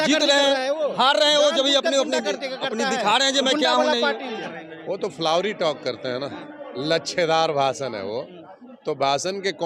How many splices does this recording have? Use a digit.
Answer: 1